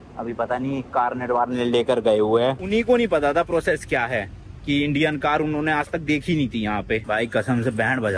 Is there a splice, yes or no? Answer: yes